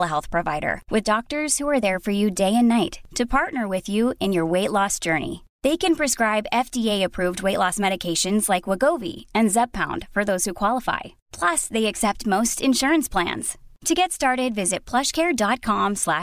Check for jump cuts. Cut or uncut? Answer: uncut